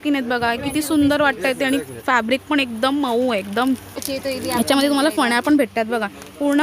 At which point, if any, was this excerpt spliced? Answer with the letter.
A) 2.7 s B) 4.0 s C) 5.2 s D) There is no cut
B